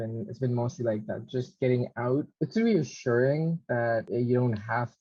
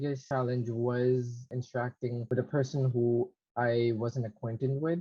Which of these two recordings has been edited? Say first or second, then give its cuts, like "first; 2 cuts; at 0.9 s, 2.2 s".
first; 2 cuts; at 2.3 s, 4.1 s